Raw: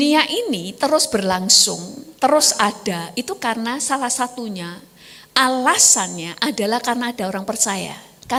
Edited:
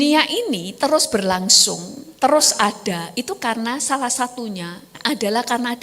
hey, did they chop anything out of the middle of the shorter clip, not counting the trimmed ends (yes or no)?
yes